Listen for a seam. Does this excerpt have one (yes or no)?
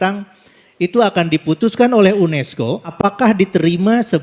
yes